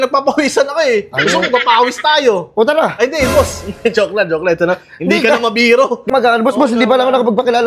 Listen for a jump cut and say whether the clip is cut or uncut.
cut